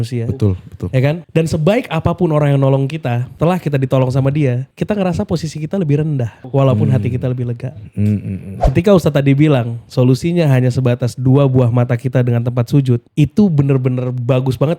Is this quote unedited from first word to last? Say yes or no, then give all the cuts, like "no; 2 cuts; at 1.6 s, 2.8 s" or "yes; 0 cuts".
no; 2 cuts; at 3.3 s, 4.7 s